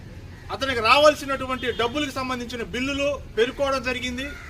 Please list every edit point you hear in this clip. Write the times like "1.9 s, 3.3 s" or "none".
3.1 s